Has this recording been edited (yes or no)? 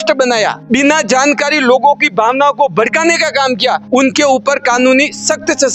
no